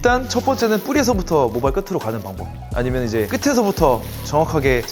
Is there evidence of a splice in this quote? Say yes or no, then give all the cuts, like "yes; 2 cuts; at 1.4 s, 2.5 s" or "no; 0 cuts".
yes; 1 cut; at 3.3 s